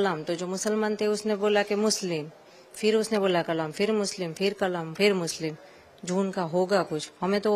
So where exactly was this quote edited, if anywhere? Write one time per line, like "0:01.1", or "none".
none